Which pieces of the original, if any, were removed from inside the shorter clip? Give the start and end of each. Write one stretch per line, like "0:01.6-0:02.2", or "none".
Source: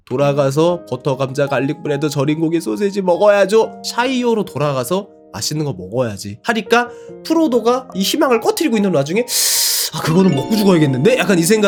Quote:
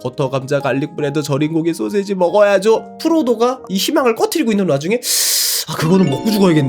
0:03.8-0:07.2

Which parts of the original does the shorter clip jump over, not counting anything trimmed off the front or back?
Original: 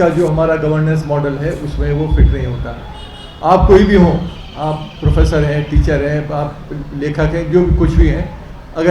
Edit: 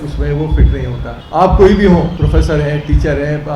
0:02.7-0:03.2
0:04.2-0:05.0

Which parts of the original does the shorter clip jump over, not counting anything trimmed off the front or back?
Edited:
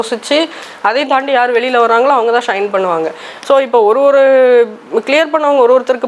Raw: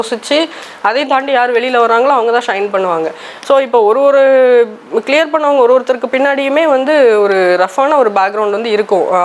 none

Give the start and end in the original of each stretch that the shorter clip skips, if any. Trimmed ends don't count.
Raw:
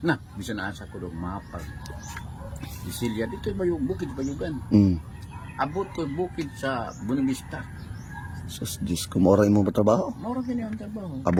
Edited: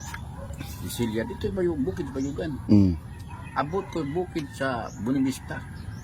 none

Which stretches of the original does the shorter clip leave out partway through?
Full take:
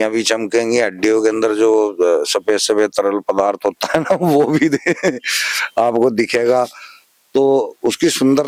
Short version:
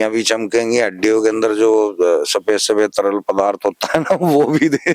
none

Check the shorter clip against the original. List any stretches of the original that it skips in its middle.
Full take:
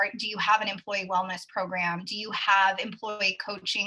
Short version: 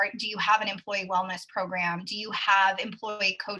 none

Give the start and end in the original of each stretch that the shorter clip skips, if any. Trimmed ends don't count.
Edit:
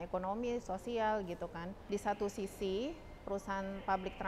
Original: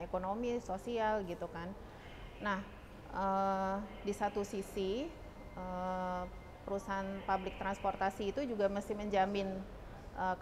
0:01.8-0:03.9
0:05.2-0:06.5

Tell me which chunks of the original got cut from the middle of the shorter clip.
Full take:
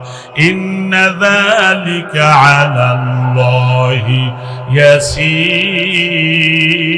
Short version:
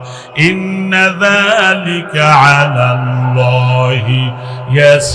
none

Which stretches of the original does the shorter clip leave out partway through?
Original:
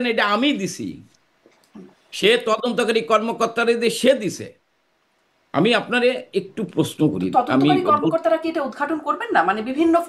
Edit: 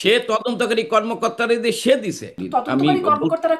0:04.6-0:07.2

